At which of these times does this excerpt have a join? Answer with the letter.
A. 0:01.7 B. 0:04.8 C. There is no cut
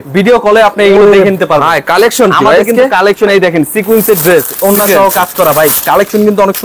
C